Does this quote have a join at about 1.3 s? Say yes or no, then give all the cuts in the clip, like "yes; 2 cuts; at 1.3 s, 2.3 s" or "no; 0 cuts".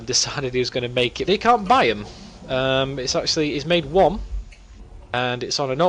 no; 0 cuts